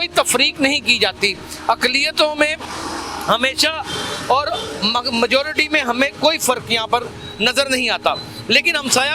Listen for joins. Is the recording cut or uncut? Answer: uncut